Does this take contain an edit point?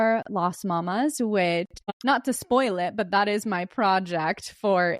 yes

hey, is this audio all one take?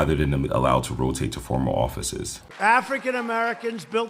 no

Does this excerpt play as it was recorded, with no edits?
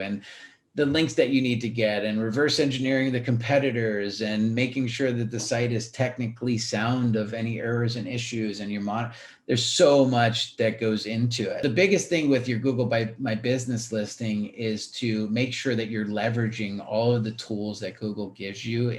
no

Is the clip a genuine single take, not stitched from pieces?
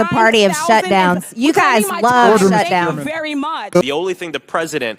no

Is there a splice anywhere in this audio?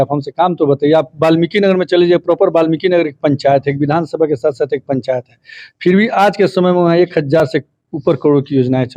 no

